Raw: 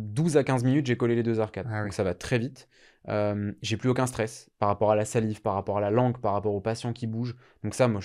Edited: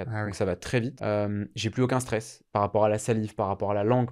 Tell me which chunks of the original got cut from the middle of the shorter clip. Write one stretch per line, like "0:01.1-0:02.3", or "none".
0:02.5-0:03.0